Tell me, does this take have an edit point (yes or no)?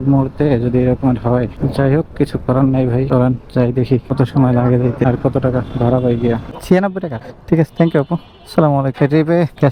no